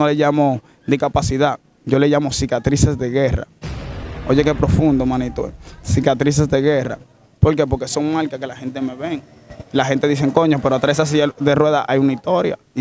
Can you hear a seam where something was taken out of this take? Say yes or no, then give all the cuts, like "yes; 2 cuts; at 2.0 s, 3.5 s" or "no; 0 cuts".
no; 0 cuts